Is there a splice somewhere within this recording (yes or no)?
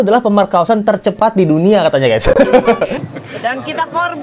yes